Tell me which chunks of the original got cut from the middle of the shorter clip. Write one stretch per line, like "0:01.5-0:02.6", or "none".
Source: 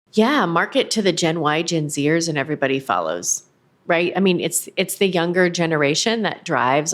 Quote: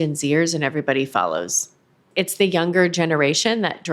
0:03.7-0:04.6